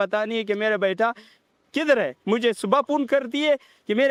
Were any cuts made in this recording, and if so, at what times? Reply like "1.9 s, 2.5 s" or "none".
none